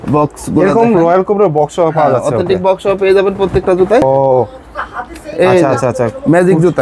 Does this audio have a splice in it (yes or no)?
yes